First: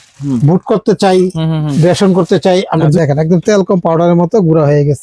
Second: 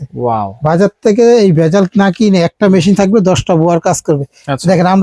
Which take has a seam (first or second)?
first